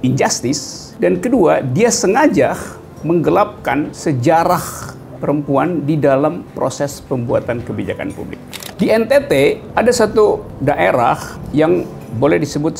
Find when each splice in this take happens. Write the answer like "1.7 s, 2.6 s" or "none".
8.6 s